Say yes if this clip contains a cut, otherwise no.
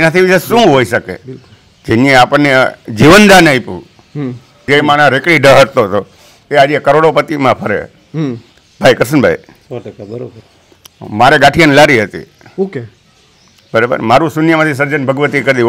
yes